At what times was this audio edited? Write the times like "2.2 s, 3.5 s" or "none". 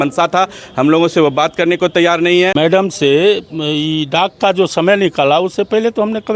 2.5 s